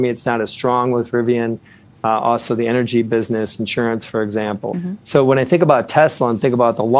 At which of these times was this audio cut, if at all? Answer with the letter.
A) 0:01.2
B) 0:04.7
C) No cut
B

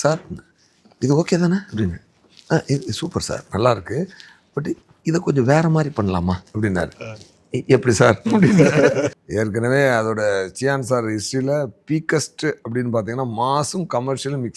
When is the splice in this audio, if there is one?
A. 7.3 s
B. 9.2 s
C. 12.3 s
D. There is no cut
B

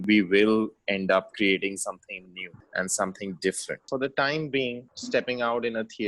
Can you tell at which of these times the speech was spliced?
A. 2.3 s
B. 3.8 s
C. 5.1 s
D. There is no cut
B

